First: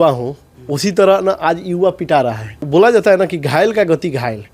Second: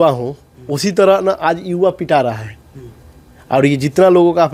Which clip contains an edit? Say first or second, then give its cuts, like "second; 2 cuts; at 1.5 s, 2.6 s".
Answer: first; 1 cut; at 2.6 s